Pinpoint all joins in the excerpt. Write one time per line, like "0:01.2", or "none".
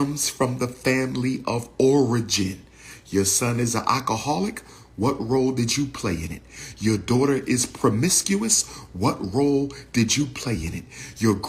none